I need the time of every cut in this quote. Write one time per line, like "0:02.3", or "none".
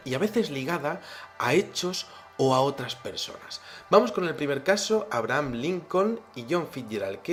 none